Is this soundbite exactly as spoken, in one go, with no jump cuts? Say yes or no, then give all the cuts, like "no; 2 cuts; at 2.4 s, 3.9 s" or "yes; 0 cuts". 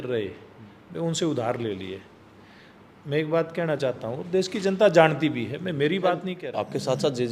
no; 1 cut; at 6.4 s